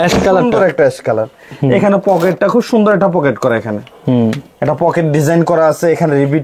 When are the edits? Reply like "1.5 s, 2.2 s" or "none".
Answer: none